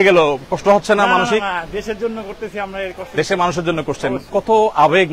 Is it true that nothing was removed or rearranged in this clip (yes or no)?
yes